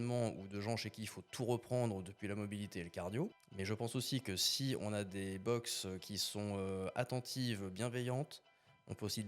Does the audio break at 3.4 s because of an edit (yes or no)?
yes